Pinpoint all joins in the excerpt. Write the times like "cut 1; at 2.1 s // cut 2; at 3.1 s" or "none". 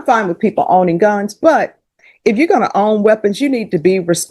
none